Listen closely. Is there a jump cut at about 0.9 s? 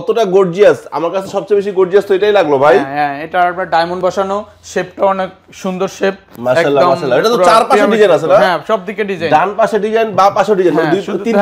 no; 0 cuts

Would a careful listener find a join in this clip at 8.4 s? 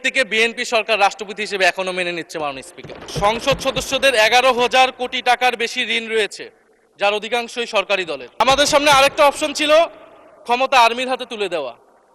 yes; 2 cuts; at 3.0 s, 8.4 s

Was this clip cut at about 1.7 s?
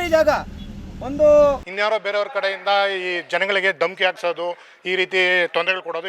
yes; 1 cut; at 1.7 s

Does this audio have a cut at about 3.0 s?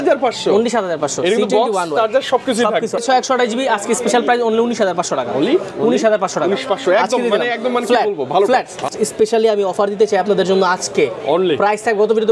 yes; 2 cuts; at 3.0 s, 8.9 s

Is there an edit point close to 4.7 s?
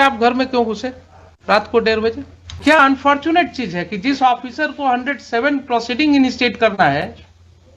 no; 1 cut; at 2.5 s

